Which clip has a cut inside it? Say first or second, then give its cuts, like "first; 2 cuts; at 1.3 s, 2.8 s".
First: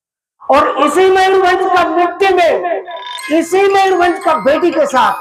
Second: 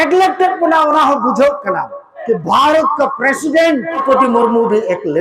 second; 2 cuts; at 2.2 s, 4.0 s